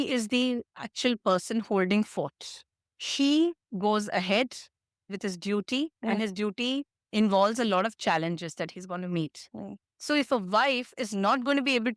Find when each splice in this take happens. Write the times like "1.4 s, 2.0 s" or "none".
2.8 s